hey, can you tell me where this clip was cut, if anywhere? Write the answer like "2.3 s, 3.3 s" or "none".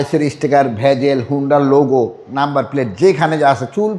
none